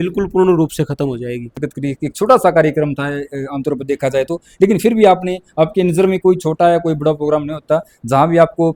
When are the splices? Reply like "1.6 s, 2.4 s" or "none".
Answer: none